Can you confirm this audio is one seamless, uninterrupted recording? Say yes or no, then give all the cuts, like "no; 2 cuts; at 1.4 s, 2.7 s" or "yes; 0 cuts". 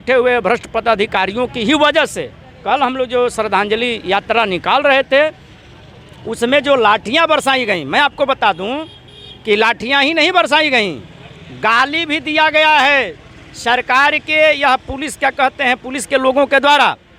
yes; 0 cuts